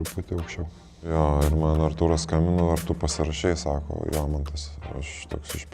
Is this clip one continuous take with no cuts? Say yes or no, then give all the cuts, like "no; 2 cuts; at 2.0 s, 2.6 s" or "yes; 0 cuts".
no; 1 cut; at 1.0 s